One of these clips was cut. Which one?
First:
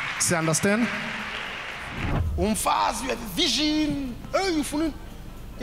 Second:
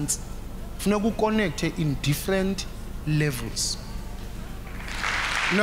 first; 1 cut; at 2.1 s

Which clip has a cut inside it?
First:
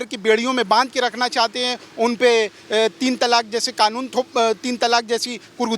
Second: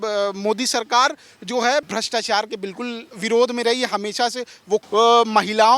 second; 3 cuts; at 1.9 s, 3.1 s, 4.9 s

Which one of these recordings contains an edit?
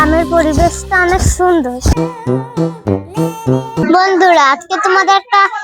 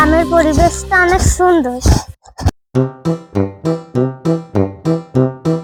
first; 2 cuts; at 1.9 s, 3.8 s

